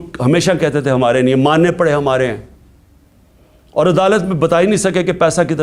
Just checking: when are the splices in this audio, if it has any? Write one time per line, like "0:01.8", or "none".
none